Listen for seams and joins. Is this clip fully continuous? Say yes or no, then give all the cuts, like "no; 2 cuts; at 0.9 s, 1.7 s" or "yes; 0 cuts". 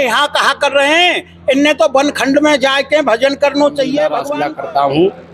no; 1 cut; at 4.4 s